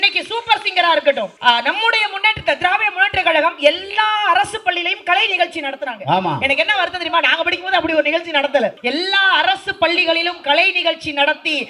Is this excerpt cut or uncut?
cut